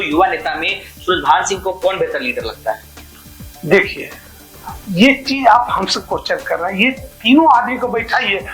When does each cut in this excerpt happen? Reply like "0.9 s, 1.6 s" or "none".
none